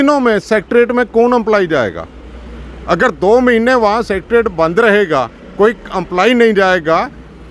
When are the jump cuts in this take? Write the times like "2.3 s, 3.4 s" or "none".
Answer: none